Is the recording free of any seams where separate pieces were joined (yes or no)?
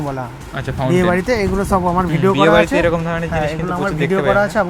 yes